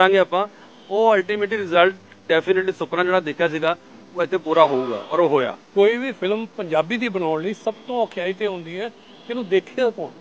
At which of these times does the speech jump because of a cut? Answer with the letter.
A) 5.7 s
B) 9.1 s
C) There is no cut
A